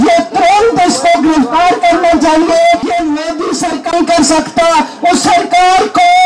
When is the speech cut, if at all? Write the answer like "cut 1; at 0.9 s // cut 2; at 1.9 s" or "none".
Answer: cut 1; at 2.8 s